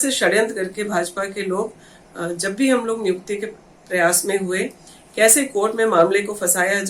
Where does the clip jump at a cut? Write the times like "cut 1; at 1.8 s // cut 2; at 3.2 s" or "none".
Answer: none